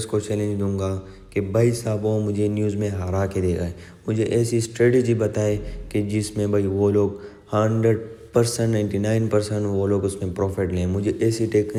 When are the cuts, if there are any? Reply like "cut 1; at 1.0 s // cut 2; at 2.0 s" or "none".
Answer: none